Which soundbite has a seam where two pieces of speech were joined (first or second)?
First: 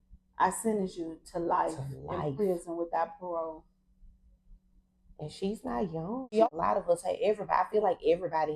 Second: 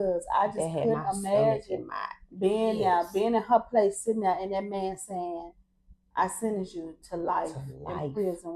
first